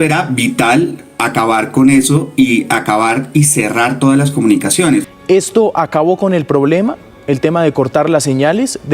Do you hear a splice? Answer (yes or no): yes